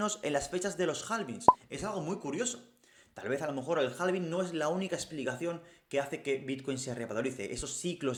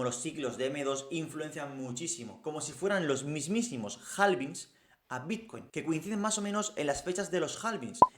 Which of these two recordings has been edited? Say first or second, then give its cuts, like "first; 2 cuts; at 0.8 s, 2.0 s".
second; 1 cut; at 5.6 s